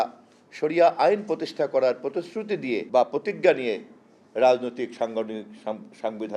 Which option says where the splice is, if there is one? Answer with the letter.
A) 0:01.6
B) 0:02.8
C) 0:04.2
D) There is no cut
B